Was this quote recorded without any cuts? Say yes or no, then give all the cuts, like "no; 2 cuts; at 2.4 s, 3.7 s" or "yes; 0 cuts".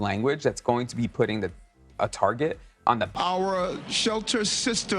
no; 1 cut; at 3.1 s